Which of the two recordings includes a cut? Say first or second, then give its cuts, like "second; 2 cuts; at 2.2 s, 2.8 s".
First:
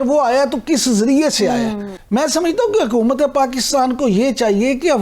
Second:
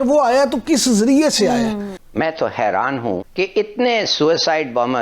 second; 1 cut; at 1.9 s